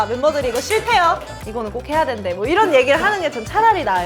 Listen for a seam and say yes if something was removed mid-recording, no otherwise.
yes